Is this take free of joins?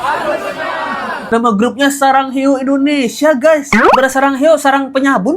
no; 1 cut; at 1.2 s

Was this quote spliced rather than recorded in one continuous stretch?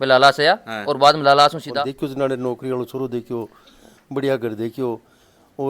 yes; 1 cut; at 1.7 s

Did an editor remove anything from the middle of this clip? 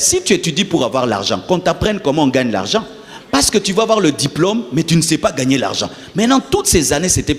no; 0 cuts

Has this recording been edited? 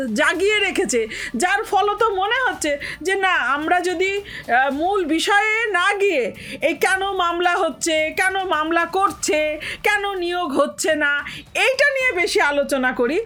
no; 0 cuts

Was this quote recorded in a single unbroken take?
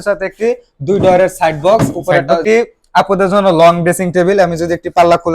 no; 1 cut; at 2.4 s

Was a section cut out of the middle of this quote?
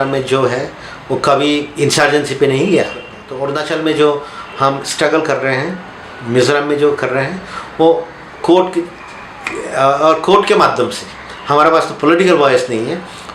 yes; 1 cut; at 3.2 s

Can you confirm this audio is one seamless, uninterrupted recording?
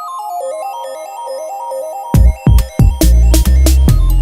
no; 1 cut; at 1.1 s

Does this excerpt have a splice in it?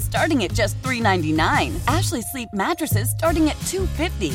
no; 0 cuts

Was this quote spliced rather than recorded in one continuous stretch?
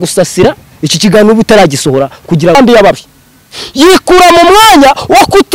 yes; 1 cut; at 2.5 s

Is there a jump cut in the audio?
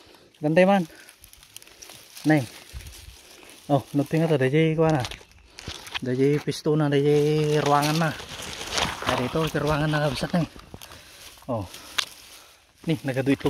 no; 0 cuts

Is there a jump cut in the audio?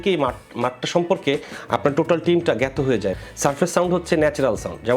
yes; 1 cut; at 3.1 s

